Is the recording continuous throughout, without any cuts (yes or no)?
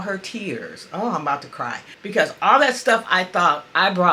no